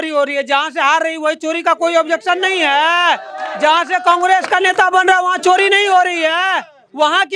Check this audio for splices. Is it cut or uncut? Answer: uncut